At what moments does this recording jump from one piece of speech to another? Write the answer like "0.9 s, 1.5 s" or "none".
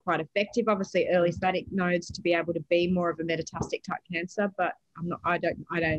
1.4 s